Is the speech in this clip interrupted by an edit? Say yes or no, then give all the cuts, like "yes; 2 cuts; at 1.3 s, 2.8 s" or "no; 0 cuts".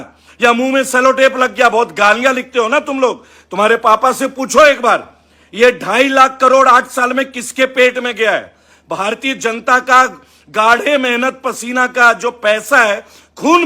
no; 0 cuts